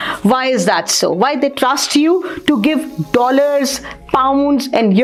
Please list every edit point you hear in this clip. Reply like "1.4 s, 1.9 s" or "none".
none